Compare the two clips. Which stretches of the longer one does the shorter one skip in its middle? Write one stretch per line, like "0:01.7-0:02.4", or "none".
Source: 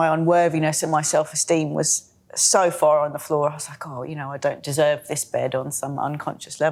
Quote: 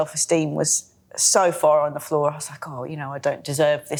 none